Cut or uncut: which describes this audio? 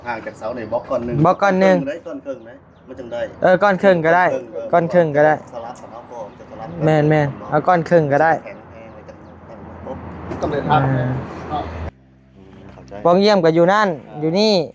cut